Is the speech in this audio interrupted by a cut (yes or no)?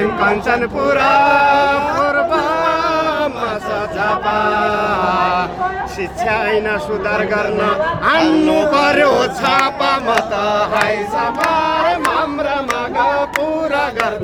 no